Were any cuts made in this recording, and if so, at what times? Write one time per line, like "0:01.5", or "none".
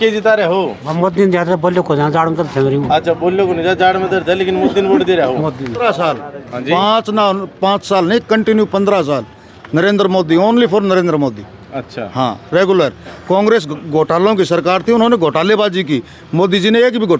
0:05.8